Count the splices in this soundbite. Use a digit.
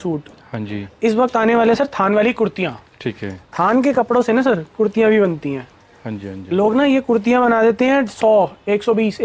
0